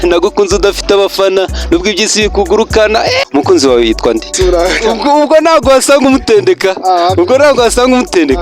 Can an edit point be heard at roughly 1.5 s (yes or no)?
no